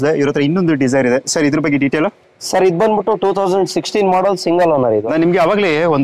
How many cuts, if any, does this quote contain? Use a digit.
1